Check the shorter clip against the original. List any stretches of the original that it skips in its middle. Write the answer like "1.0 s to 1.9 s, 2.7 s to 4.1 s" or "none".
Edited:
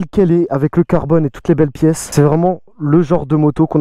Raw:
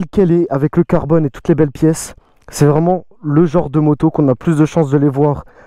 2.0 s to 2.5 s